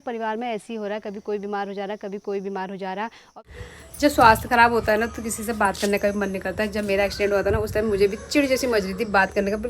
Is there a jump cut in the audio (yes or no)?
yes